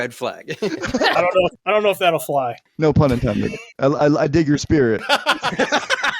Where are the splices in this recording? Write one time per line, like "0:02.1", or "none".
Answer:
0:01.6
0:02.6
0:03.7
0:05.0